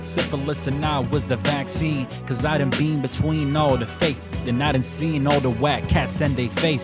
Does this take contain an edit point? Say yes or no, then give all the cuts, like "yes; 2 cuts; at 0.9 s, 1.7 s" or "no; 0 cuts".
no; 0 cuts